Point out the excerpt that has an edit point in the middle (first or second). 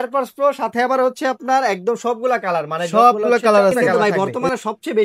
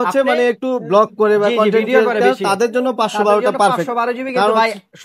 first